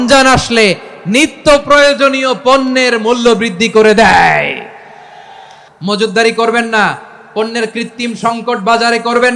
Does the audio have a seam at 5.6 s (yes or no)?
yes